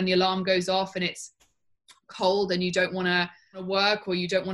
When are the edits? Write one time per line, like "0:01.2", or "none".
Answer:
0:03.6